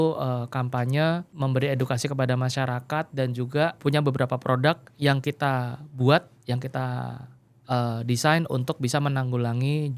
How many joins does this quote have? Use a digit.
2